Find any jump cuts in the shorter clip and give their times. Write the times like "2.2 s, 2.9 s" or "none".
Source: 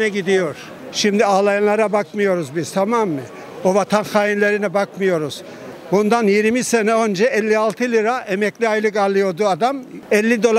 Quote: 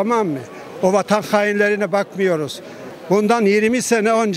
none